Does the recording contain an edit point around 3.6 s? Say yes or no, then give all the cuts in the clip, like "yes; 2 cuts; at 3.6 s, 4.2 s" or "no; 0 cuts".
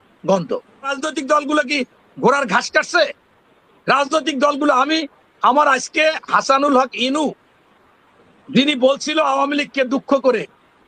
no; 1 cut; at 0.9 s